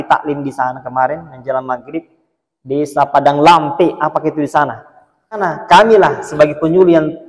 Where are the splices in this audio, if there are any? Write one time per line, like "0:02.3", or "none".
0:05.5